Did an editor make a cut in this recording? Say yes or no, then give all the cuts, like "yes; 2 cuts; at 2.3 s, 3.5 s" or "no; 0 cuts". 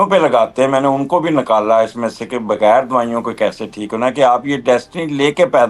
no; 0 cuts